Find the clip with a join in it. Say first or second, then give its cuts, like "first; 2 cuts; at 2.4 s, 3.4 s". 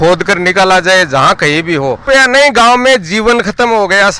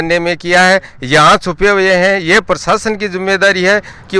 first; 1 cut; at 2.0 s